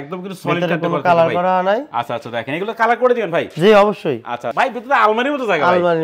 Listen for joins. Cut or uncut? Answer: cut